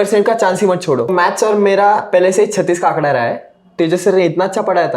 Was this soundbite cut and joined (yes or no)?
yes